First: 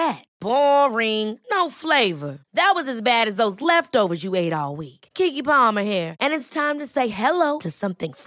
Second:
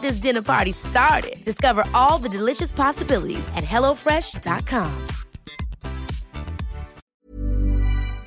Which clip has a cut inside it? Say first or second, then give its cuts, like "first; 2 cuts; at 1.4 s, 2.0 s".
second; 1 cut; at 7.0 s